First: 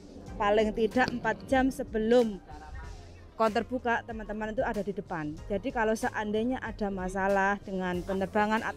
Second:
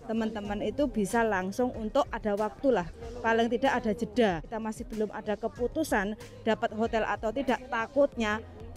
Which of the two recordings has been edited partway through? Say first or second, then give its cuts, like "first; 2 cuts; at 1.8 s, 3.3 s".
second; 1 cut; at 4.5 s